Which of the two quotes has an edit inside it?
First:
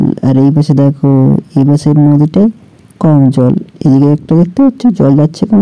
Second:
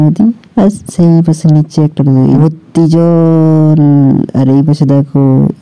second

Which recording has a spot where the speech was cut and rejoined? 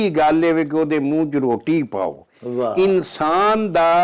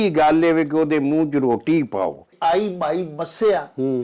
second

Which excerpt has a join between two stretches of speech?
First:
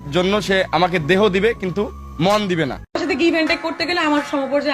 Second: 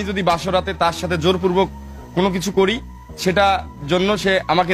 first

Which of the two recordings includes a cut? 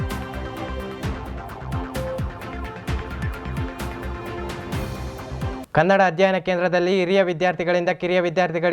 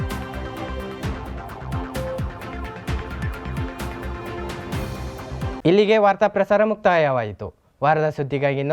first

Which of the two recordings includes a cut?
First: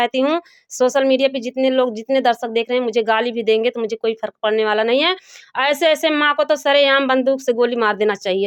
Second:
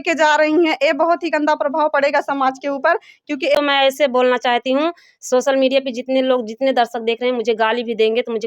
second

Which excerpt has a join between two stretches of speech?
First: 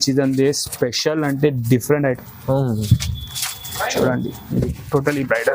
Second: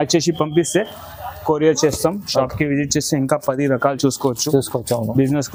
first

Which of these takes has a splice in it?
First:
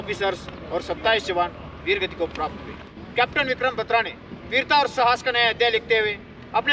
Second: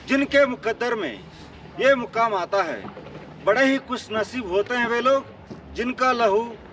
first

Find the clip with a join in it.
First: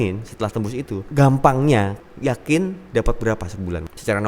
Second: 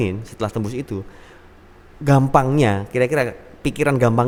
first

